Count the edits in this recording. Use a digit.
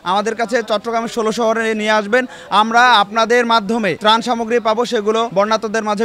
2